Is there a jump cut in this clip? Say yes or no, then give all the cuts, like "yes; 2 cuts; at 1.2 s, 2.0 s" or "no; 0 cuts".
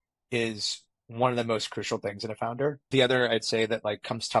yes; 1 cut; at 2.9 s